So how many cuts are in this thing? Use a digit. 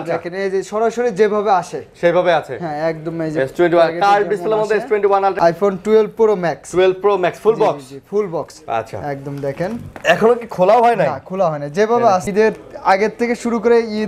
2